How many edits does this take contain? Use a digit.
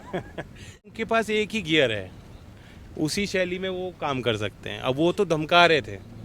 1